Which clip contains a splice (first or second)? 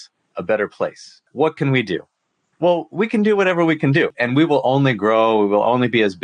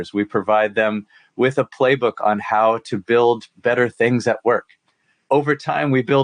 first